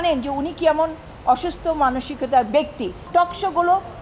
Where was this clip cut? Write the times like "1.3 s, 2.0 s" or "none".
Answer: 3.1 s